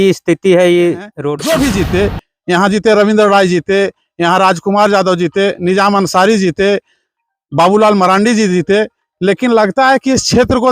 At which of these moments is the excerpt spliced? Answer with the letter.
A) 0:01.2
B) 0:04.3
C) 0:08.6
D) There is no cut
A